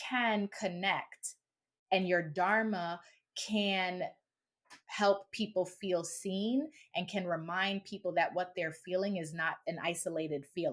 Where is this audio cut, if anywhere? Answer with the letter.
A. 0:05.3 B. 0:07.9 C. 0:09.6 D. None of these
C